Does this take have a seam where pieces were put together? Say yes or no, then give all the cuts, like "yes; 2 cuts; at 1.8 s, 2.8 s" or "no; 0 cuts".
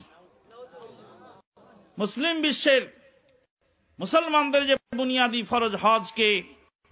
yes; 1 cut; at 1.7 s